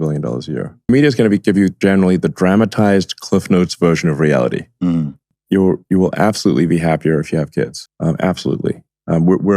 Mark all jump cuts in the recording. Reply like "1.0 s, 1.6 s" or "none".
5.4 s